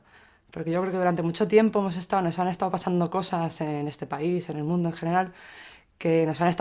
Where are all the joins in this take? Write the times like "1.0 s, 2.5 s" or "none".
none